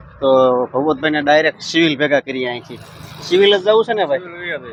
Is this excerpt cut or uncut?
uncut